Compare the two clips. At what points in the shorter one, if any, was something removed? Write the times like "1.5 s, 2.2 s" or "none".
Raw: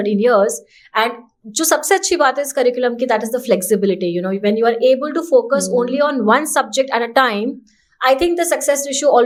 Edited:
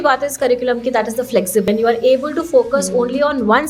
1.6 s

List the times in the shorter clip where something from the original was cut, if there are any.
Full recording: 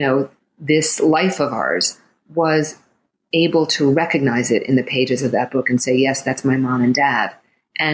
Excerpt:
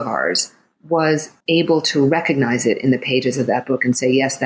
1.3 s

